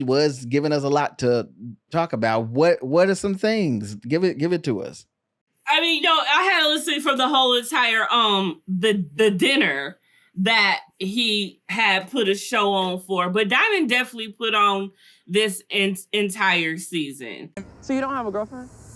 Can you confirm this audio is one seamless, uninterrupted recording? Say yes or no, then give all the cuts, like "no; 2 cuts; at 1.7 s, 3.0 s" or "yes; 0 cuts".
yes; 0 cuts